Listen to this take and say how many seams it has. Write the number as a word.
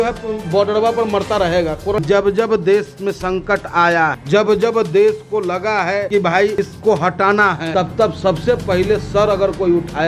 four